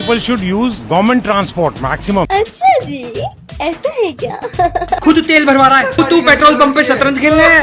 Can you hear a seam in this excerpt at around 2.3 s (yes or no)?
yes